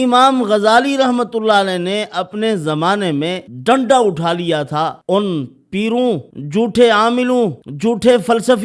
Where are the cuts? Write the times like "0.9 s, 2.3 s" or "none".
3.5 s, 5.0 s, 6.3 s, 7.6 s